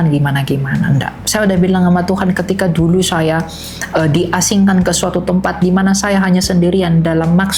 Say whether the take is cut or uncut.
uncut